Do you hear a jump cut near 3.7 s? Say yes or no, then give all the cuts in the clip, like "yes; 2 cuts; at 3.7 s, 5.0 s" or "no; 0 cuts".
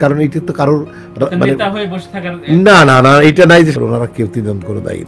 yes; 1 cut; at 3.7 s